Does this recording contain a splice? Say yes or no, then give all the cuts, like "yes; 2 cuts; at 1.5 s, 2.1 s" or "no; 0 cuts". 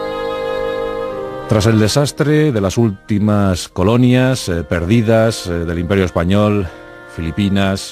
no; 0 cuts